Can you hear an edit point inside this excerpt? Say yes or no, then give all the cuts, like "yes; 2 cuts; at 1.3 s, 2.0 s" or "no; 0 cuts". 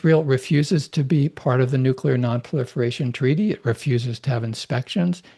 no; 0 cuts